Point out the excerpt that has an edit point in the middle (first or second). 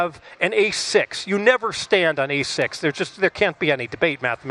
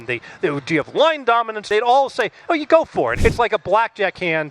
second